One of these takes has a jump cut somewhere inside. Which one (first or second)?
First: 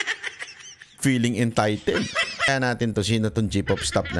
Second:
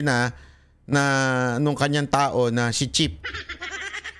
first